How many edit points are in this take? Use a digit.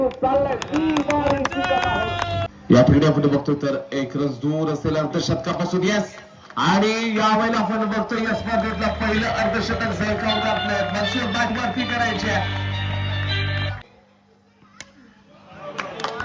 2